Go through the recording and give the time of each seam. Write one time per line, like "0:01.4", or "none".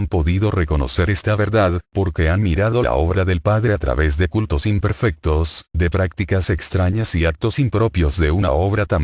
0:07.0